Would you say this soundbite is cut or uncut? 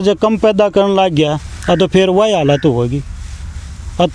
uncut